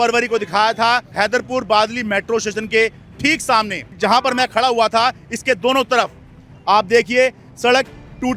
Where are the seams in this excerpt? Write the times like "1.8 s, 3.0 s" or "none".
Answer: 1.1 s, 3.9 s